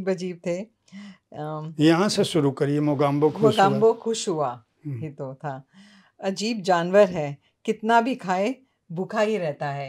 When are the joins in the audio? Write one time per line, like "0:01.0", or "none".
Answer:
none